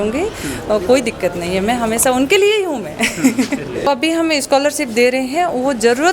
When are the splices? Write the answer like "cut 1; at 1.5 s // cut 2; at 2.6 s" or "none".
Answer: cut 1; at 3.9 s